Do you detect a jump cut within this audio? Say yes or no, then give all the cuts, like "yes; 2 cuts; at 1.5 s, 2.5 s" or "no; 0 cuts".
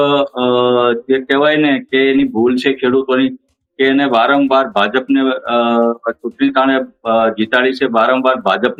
no; 0 cuts